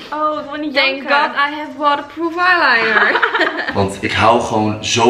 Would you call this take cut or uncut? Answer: cut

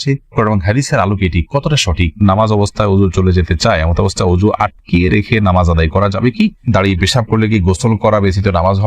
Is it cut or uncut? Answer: cut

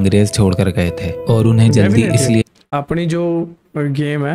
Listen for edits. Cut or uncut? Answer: uncut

